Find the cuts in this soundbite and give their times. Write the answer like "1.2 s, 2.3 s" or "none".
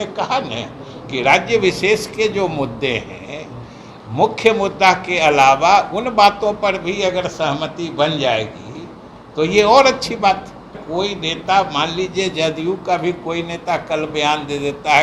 10.8 s